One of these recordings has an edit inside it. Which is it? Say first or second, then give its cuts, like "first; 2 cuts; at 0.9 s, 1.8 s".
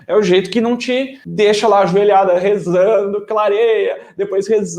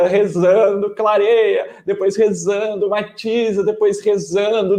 first; 1 cut; at 1.2 s